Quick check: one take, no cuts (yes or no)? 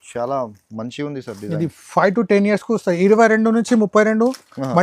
yes